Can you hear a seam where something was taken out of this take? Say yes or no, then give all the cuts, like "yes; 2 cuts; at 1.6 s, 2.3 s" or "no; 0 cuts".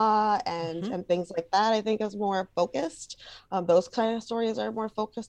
no; 0 cuts